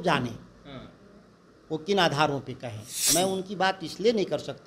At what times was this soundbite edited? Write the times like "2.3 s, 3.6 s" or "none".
none